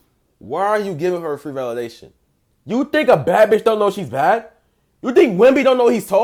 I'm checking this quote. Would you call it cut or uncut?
uncut